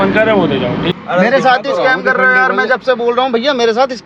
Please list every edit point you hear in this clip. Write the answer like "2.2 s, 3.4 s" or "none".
1.0 s